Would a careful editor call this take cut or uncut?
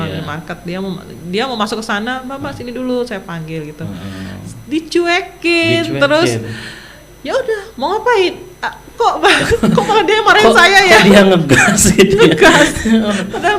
uncut